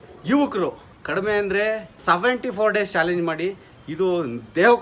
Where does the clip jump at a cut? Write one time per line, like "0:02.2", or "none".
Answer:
0:00.9
0:01.9